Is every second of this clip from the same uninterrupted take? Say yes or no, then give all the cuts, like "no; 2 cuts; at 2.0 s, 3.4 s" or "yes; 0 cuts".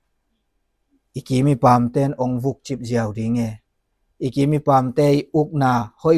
yes; 0 cuts